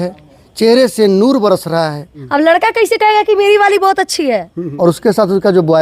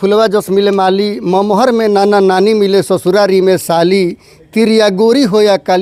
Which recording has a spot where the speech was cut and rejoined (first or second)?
first